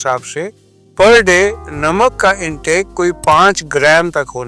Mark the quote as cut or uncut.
uncut